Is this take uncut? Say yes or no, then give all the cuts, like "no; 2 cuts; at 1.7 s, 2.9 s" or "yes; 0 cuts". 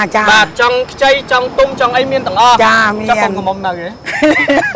yes; 0 cuts